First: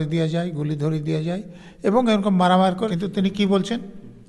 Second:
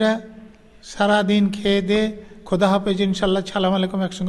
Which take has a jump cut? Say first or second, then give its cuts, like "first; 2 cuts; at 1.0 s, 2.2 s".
first; 1 cut; at 2.9 s